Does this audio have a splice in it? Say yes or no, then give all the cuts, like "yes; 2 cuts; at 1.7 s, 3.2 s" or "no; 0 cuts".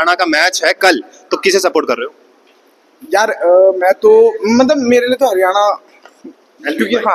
no; 0 cuts